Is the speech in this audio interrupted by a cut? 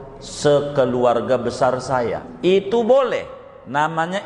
yes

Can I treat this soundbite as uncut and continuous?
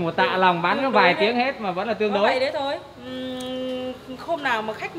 yes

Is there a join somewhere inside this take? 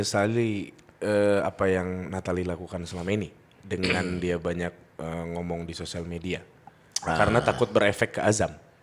no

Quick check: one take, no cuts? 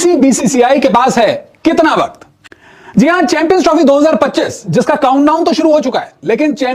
yes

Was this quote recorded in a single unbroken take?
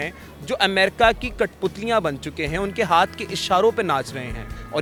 yes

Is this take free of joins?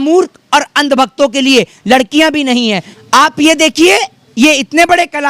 no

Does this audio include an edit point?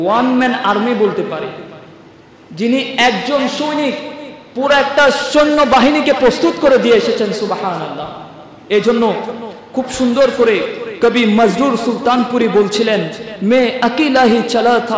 no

